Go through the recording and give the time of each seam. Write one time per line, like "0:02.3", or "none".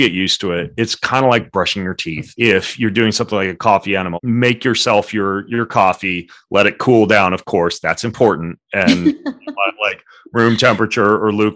0:02.2
0:04.1